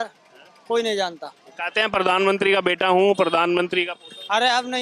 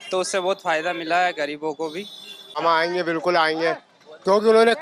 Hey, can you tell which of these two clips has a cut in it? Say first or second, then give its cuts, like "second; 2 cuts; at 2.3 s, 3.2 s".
second; 1 cut; at 2.6 s